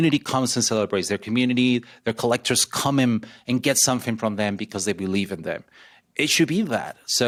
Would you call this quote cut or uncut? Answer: uncut